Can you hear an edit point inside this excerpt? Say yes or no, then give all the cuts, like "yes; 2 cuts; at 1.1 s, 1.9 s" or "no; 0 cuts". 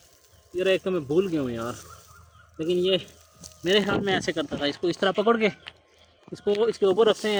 no; 0 cuts